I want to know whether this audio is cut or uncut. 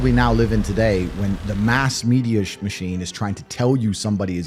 uncut